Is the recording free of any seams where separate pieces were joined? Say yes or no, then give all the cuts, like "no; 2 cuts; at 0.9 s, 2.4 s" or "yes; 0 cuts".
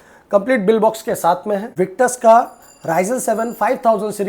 no; 1 cut; at 1.7 s